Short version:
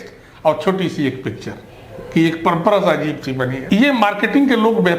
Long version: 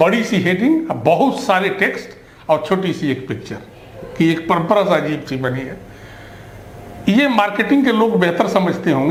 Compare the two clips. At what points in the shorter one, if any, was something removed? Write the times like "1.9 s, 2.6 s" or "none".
3.6 s